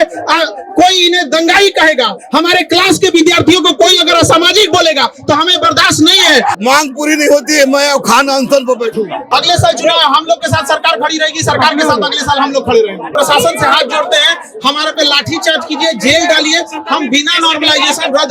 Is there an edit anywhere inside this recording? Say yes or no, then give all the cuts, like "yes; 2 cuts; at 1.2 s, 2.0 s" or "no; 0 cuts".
yes; 3 cuts; at 6.6 s, 9.2 s, 13.1 s